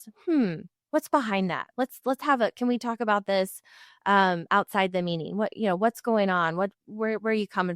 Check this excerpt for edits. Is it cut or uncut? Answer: cut